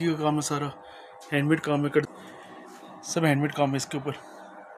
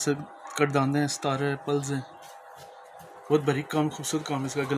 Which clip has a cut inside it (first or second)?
first